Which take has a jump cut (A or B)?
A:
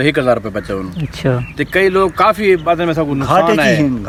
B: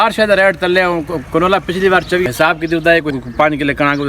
B